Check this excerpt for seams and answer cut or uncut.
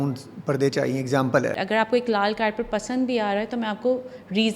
cut